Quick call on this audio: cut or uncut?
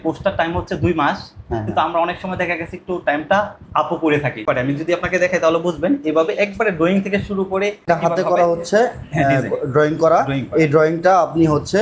cut